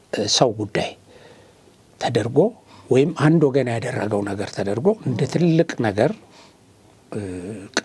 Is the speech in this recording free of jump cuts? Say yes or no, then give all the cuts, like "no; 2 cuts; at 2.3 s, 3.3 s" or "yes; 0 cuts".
yes; 0 cuts